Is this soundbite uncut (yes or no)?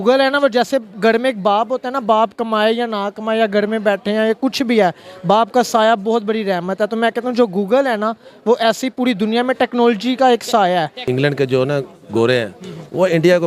no